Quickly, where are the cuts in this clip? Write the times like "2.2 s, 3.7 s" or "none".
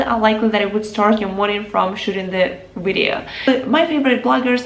3.4 s